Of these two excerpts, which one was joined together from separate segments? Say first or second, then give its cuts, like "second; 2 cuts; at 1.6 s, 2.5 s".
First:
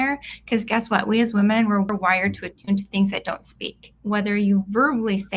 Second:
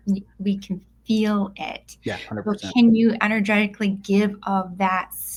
first; 2 cuts; at 1.9 s, 3.9 s